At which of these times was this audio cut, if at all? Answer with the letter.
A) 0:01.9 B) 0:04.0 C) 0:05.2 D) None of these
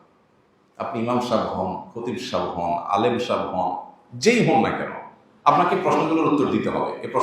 D